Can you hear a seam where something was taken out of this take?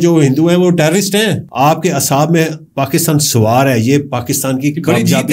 yes; 1 cut; at 1.4 s

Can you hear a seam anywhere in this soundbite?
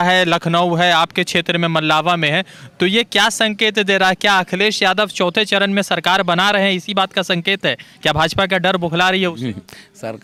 no; 0 cuts

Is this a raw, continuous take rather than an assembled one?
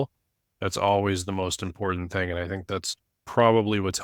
yes; 0 cuts

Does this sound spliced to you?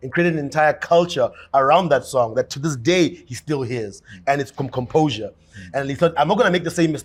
no; 0 cuts

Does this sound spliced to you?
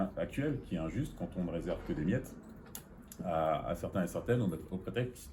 no; 0 cuts

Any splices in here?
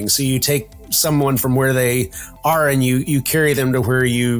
no; 0 cuts

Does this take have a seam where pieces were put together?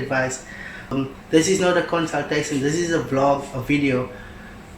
yes; 1 cut; at 0.9 s

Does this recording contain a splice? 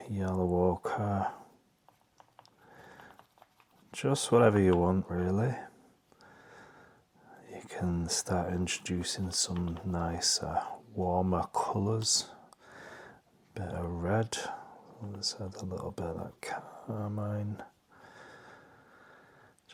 no; 0 cuts

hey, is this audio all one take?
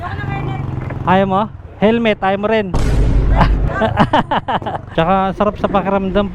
no; 1 cut; at 4.8 s

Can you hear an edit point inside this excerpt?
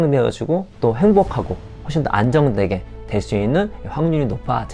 no; 0 cuts

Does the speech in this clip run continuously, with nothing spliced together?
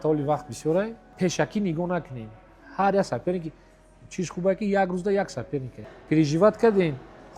no; 2 cuts; at 1.0 s, 5.8 s

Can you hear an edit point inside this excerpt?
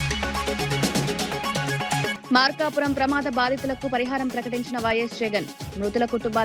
yes; 1 cut; at 2.1 s

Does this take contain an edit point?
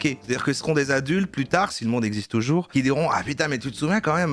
no; 0 cuts

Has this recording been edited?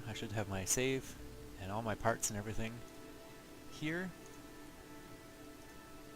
yes; 1 cut; at 4.9 s

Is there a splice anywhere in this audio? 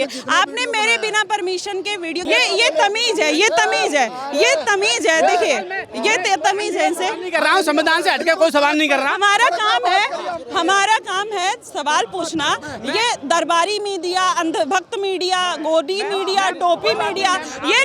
yes; 1 cut; at 2.2 s

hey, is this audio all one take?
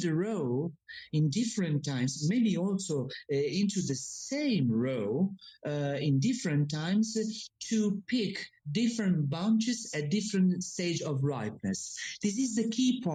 yes; 0 cuts

